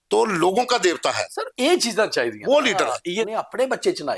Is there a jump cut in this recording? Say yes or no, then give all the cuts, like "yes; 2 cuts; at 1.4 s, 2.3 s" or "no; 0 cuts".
yes; 1 cut; at 3.3 s